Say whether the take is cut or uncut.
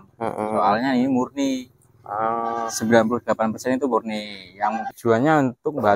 cut